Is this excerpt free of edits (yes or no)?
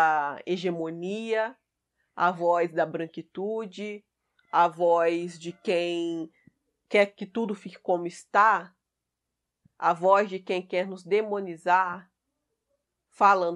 yes